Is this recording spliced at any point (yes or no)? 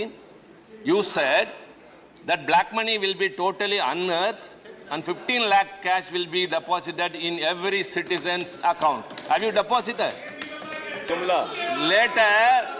yes